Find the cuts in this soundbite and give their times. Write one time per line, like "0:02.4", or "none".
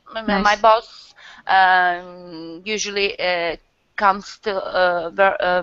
none